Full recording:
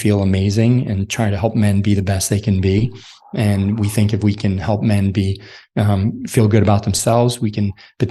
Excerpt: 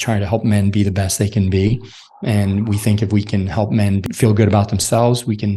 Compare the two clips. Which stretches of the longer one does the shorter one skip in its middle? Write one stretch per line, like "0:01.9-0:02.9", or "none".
0:05.1-0:06.2